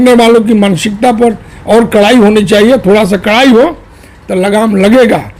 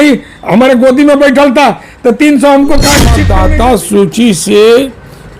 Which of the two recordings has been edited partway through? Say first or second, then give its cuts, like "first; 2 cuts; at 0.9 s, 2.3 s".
second; 1 cut; at 3.2 s